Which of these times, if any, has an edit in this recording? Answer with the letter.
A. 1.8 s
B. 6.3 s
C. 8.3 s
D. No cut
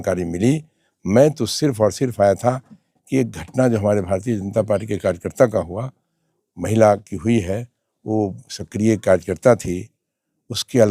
D